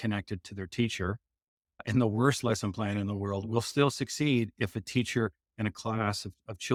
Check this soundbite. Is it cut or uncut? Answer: uncut